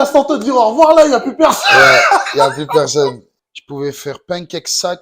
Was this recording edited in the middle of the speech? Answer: yes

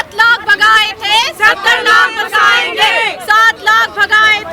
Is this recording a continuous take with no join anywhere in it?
yes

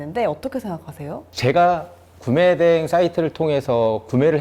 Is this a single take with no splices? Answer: yes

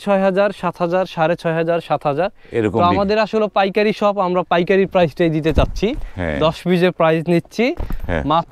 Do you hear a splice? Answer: no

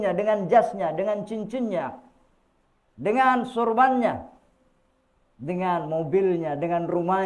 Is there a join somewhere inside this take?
no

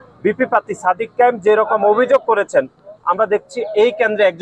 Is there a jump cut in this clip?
no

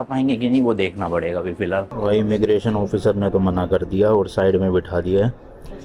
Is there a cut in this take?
yes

